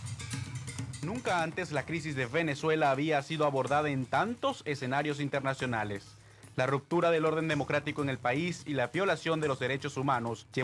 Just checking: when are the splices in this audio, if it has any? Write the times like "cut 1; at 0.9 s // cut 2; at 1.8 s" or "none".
cut 1; at 6.7 s

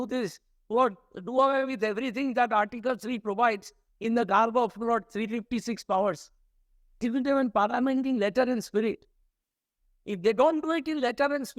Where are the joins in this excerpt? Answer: cut 1; at 7.0 s

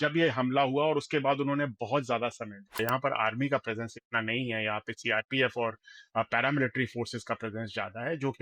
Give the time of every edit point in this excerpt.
cut 1; at 2.8 s

